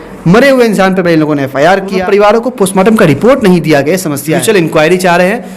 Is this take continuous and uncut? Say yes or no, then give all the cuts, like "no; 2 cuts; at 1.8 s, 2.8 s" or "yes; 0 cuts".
no; 2 cuts; at 2.0 s, 4.4 s